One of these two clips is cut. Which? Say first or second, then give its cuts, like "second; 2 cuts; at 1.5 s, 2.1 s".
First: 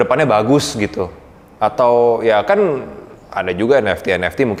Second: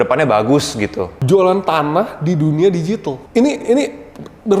second; 1 cut; at 1.2 s